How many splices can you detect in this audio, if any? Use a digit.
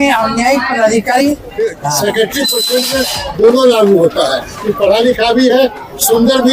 1